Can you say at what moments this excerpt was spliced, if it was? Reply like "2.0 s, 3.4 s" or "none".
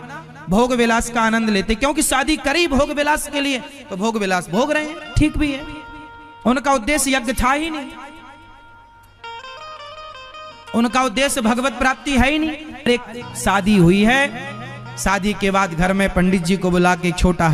6.6 s